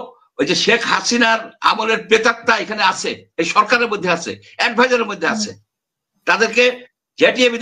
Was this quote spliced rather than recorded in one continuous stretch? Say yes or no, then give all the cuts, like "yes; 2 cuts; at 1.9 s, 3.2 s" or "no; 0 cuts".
no; 0 cuts